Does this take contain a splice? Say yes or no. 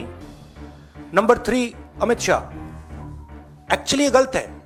no